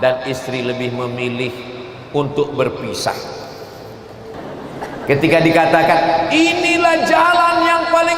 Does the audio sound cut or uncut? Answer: cut